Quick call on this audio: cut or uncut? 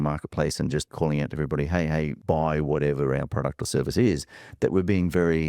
cut